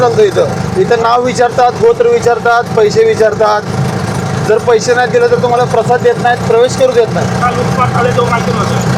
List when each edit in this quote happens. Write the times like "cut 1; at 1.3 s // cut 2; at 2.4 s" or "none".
cut 1; at 7.4 s

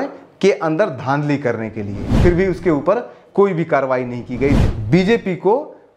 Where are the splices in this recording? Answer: cut 1; at 2.1 s // cut 2; at 4.6 s

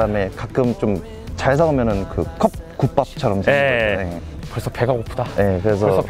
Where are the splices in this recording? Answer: cut 1; at 4.3 s

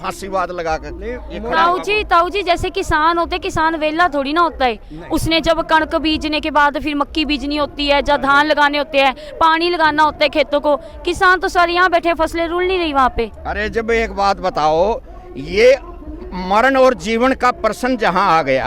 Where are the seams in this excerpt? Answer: none

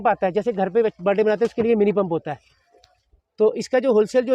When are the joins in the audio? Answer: none

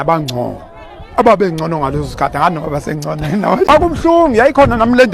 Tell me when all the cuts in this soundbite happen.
cut 1; at 3.7 s

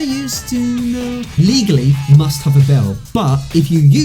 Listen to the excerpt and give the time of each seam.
cut 1; at 1.3 s

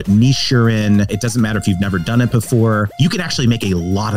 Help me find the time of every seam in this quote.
cut 1; at 1.1 s // cut 2; at 2.9 s

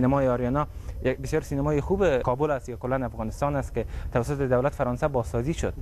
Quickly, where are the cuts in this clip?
none

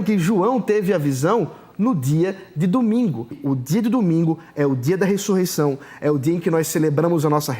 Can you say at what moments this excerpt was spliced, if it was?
cut 1; at 3.4 s

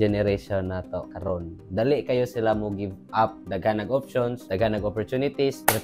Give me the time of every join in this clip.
cut 1; at 4.4 s

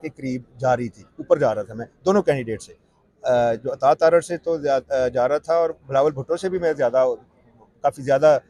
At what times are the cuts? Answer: none

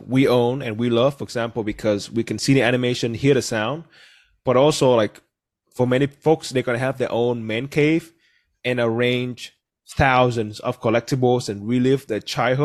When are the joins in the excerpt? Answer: none

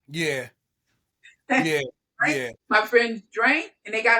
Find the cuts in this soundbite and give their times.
cut 1; at 2.6 s

